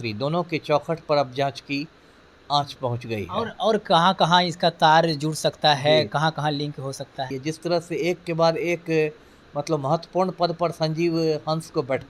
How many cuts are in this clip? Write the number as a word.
one